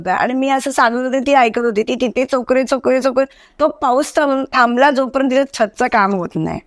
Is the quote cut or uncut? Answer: uncut